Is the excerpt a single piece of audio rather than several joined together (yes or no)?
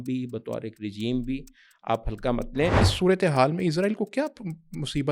no